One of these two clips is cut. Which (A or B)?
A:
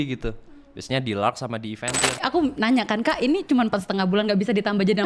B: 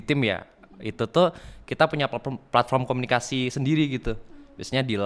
A